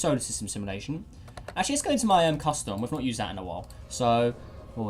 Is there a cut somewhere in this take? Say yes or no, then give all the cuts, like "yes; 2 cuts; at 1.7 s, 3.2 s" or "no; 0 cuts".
yes; 1 cut; at 2.4 s